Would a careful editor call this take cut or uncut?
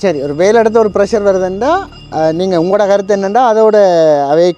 uncut